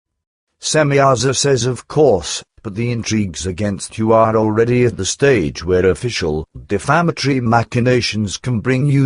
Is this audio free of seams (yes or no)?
no